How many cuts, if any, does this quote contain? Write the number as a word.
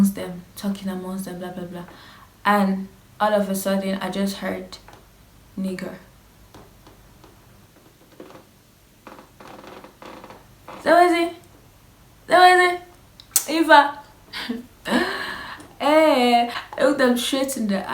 one